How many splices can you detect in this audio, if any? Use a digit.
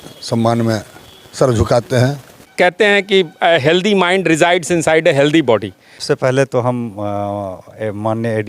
2